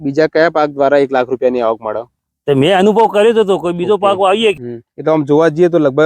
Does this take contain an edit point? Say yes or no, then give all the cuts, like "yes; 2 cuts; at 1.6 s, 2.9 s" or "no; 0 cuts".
yes; 1 cut; at 4.6 s